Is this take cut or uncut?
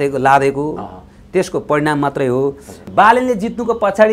cut